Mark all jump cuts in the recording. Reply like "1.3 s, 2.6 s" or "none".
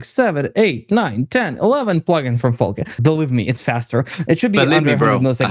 3.0 s